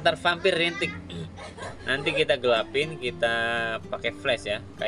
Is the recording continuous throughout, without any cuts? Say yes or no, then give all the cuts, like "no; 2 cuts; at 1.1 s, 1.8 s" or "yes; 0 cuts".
yes; 0 cuts